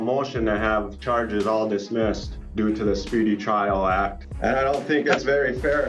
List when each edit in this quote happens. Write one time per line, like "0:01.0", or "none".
0:02.4
0:04.2